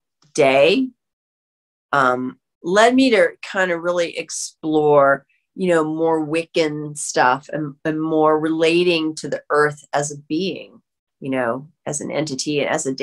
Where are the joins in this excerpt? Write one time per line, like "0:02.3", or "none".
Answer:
none